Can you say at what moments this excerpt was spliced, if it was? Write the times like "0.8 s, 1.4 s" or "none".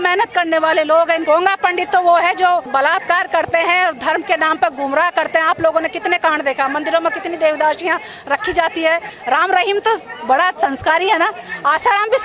1.2 s, 2.7 s, 9.1 s

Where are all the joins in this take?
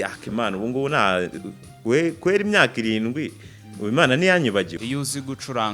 4.8 s

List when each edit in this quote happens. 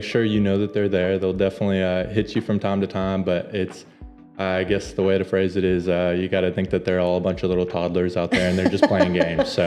none

